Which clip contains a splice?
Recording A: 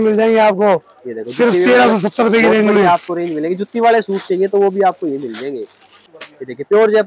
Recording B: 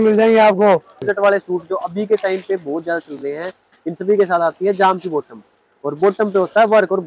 B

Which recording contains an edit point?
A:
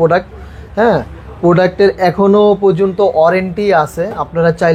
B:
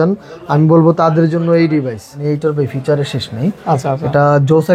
B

